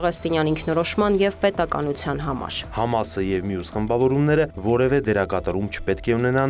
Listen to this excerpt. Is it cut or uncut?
cut